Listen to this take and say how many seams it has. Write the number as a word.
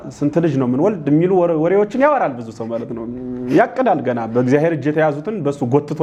zero